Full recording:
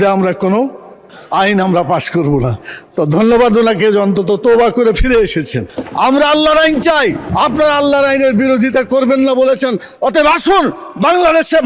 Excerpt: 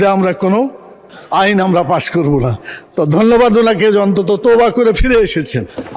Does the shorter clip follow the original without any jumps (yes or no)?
yes